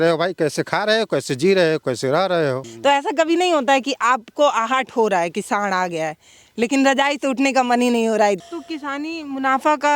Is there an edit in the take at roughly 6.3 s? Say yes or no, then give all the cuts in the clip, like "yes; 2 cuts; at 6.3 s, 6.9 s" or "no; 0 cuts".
no; 2 cuts; at 2.7 s, 8.4 s